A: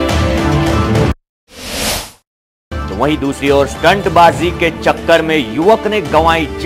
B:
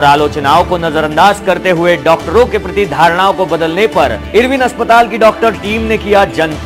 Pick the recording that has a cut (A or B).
A